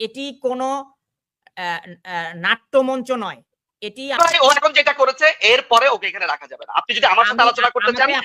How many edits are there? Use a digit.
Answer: 1